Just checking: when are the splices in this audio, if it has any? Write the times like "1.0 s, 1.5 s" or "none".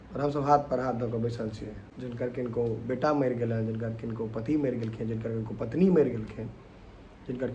1.9 s